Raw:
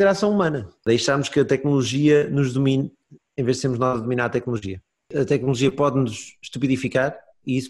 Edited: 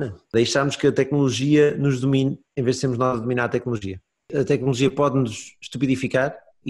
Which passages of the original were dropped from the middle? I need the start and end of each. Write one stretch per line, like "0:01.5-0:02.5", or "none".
0:03.0-0:03.3